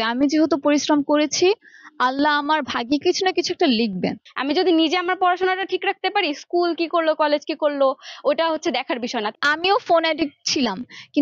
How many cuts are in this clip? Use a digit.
2